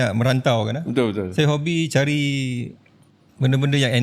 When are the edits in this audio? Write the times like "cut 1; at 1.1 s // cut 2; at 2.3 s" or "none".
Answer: none

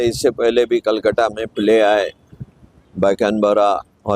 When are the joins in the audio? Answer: none

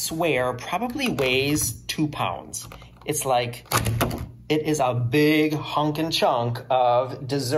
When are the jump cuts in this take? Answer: cut 1; at 6.6 s

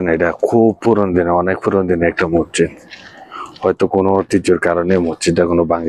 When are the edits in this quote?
none

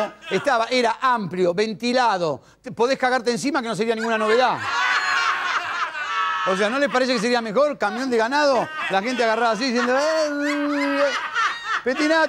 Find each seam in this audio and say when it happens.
none

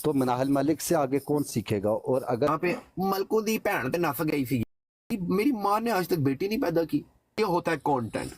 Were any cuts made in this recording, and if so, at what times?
cut 1; at 2.5 s // cut 2; at 5.1 s // cut 3; at 7.4 s

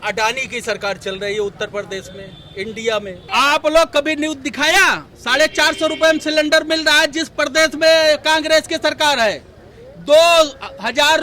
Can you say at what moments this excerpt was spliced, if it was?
cut 1; at 3.2 s

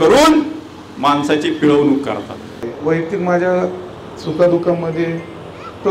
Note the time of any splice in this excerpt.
cut 1; at 2.7 s

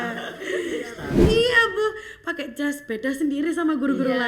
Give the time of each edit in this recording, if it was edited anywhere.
cut 1; at 1.2 s

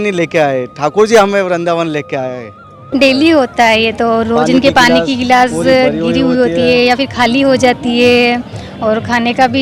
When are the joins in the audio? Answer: cut 1; at 2.9 s

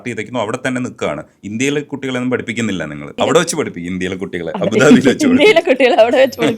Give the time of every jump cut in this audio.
cut 1; at 3.2 s

